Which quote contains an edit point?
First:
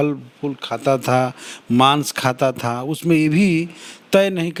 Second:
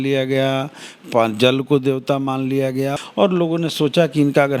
second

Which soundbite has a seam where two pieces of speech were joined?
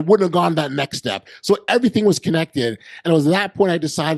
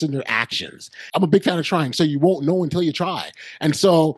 second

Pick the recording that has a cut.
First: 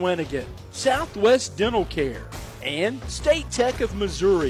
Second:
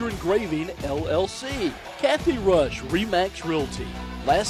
second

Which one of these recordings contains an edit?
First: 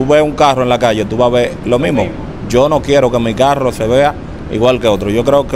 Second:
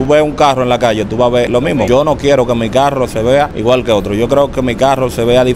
second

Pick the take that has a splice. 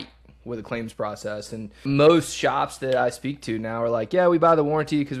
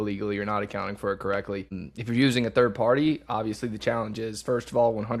first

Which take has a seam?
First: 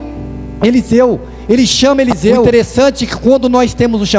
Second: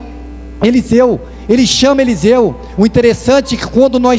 first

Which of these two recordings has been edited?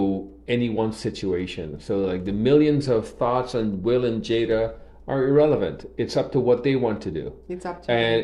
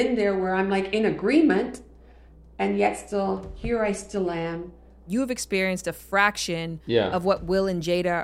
second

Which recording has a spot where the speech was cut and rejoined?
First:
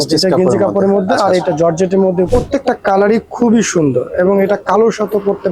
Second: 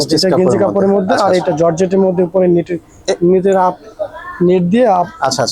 first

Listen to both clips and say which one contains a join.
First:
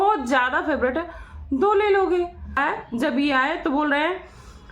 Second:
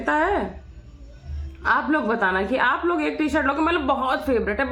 first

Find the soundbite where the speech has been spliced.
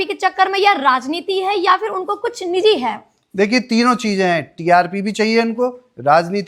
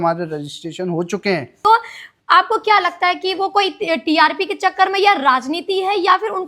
second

